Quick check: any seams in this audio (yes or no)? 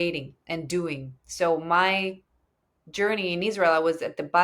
no